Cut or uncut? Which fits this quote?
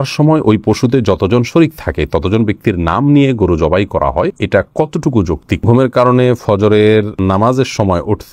cut